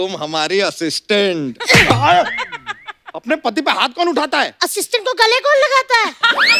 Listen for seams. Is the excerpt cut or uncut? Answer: uncut